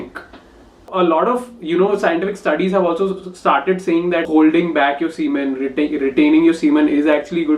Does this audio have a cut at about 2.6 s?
no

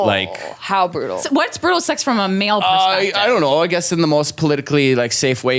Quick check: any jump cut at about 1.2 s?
yes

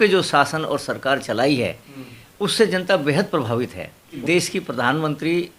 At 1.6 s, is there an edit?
no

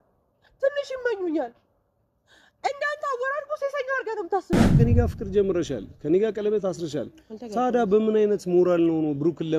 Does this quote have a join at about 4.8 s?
yes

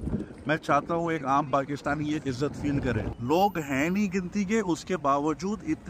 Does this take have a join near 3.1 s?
yes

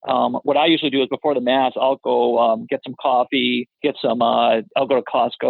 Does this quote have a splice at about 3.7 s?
yes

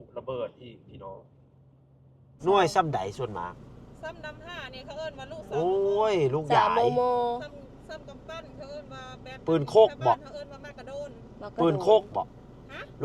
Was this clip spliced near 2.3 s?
yes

